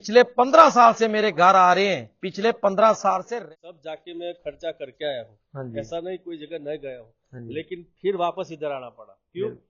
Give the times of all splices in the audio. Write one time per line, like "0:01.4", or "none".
0:03.3

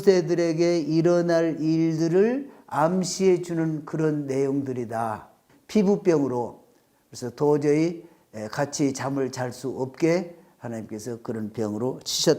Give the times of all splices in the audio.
0:05.4

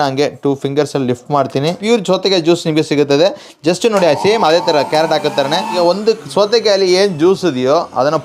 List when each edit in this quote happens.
0:01.8
0:05.8

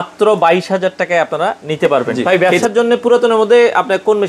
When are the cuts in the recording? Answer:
0:02.1

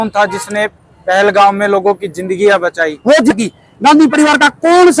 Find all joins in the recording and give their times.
0:03.3

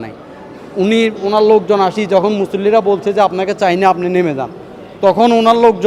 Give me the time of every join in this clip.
none

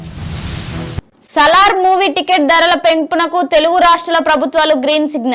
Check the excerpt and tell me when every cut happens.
0:01.0

